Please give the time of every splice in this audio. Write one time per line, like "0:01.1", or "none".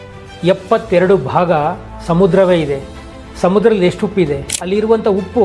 0:04.5